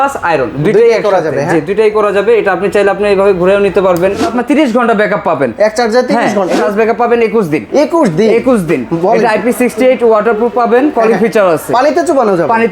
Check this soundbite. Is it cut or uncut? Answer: cut